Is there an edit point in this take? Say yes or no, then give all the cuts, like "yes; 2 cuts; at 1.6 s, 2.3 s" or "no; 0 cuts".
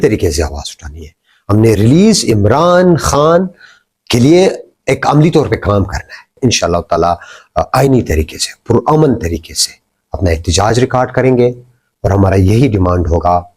yes; 1 cut; at 6.4 s